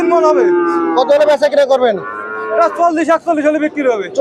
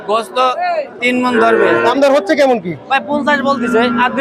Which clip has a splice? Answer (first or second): second